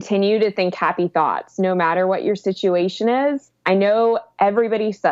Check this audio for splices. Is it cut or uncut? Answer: uncut